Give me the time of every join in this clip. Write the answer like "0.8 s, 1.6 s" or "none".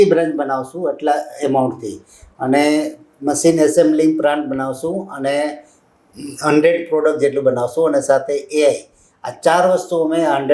none